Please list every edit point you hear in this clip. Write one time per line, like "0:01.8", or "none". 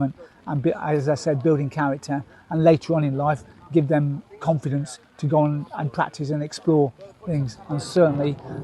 none